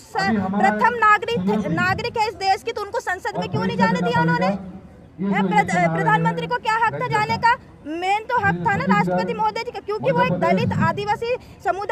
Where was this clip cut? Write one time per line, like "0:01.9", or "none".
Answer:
none